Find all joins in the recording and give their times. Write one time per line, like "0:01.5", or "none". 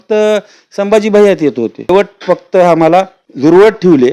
0:01.9
0:03.2